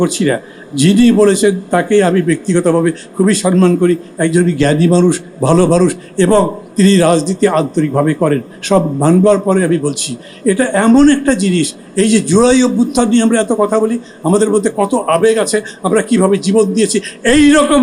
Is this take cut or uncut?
uncut